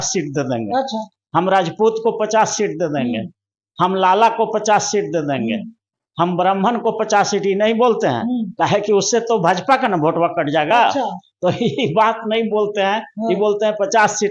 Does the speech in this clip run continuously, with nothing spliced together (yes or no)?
yes